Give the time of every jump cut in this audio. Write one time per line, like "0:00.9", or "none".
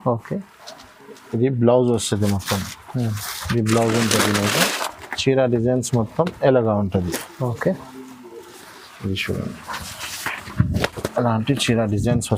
none